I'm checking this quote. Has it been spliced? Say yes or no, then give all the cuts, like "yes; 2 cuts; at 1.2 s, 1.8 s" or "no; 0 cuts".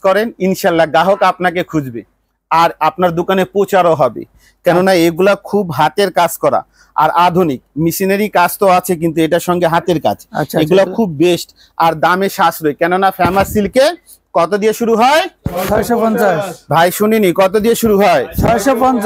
no; 0 cuts